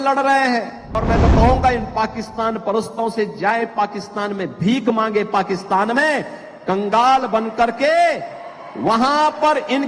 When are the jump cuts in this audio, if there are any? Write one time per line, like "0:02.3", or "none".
0:01.0